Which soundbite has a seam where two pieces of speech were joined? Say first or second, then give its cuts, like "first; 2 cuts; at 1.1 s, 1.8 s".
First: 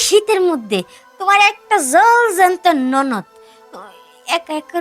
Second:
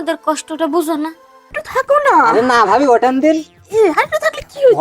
second; 1 cut; at 1.6 s